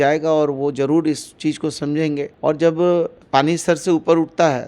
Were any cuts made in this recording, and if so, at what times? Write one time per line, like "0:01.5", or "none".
0:02.3
0:03.2

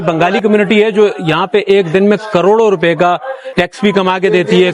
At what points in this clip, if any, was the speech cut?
0:03.4

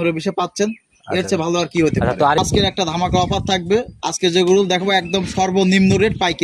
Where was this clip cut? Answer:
0:02.4

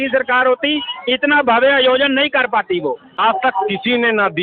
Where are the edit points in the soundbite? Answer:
0:03.2

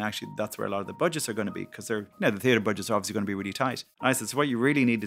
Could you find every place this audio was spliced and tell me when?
0:02.1
0:03.9

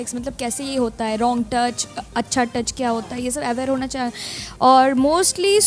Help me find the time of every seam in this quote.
none

